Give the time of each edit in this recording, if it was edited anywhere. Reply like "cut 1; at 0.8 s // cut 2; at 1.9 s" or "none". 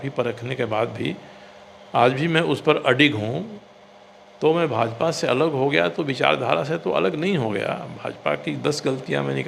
none